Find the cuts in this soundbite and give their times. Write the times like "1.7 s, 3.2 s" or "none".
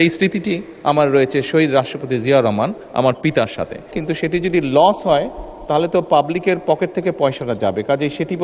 3.9 s